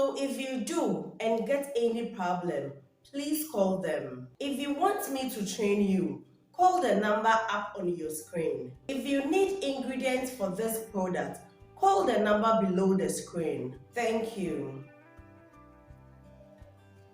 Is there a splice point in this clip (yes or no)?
yes